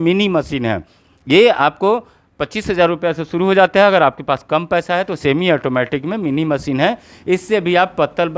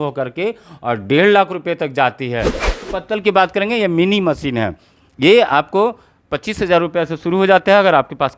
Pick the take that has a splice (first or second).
second